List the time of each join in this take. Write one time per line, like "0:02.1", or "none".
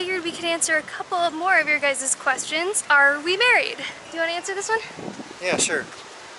0:02.8